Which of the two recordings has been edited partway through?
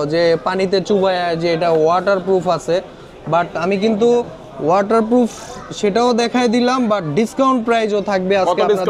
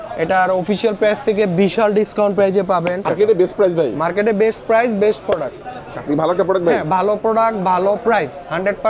second; 2 cuts; at 3.1 s, 5.9 s

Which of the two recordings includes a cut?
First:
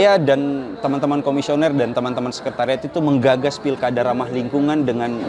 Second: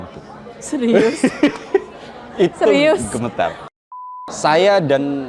second; 1 cut; at 3.7 s

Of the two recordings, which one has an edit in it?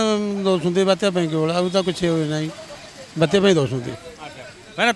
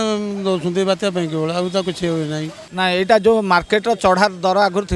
second; 1 cut; at 2.6 s

